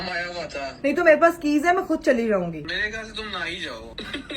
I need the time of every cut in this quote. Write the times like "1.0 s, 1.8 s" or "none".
0.8 s, 2.6 s